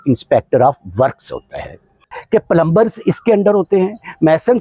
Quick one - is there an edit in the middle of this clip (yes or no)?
yes